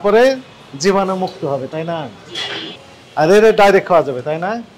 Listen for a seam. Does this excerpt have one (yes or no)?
yes